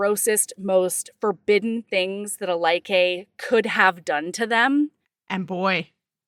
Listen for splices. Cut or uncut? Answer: uncut